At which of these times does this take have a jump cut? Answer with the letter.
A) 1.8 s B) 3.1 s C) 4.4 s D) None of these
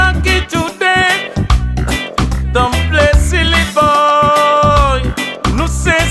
D